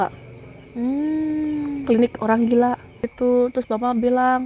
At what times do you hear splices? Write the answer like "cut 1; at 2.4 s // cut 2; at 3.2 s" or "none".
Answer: cut 1; at 3.0 s